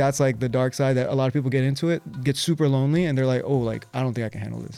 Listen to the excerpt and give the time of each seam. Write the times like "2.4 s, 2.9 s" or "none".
none